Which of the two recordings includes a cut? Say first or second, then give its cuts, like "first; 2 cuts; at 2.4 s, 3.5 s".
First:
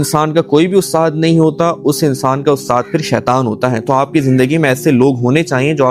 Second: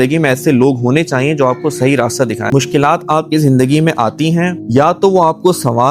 second; 2 cuts; at 2.4 s, 4.6 s